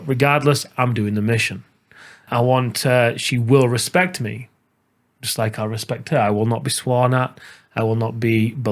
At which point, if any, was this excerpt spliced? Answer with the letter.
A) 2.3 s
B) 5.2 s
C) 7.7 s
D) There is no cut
A